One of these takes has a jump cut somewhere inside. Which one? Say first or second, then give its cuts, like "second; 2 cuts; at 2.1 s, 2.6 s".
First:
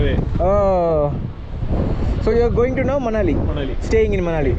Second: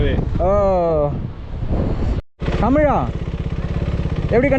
second; 1 cut; at 2.2 s